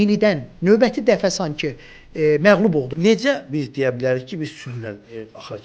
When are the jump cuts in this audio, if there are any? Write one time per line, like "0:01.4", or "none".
0:02.9